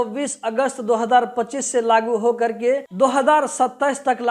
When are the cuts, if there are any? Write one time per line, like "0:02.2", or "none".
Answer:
none